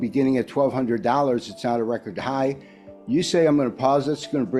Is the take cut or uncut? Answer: uncut